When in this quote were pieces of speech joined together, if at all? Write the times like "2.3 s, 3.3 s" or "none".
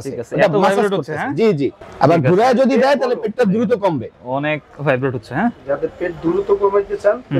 none